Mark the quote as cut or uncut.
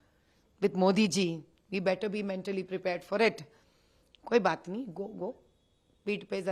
uncut